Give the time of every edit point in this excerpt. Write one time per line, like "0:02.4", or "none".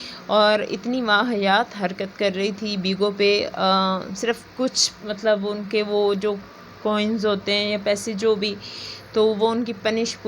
none